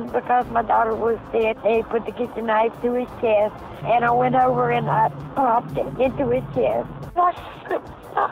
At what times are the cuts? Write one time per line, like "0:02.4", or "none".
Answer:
0:01.6
0:07.1